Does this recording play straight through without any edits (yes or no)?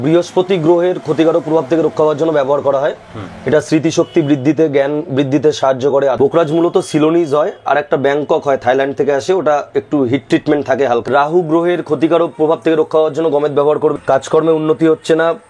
no